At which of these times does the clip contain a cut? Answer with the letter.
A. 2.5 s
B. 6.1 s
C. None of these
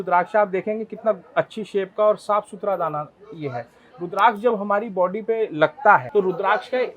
B